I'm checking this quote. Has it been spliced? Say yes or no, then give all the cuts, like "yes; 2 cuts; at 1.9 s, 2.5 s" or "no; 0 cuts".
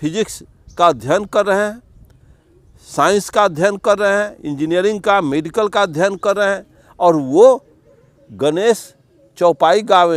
no; 0 cuts